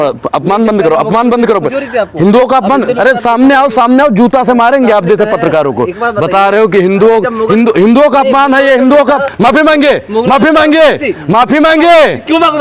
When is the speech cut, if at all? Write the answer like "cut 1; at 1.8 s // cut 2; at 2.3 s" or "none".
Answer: none